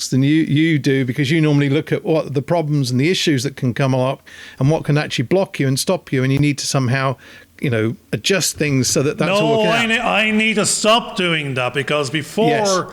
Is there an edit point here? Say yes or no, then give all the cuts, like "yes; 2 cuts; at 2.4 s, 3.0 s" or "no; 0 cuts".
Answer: no; 0 cuts